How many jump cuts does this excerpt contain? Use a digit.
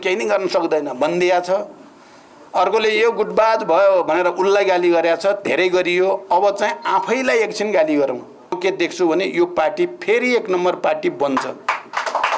1